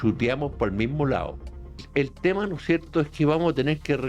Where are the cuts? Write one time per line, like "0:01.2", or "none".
0:01.8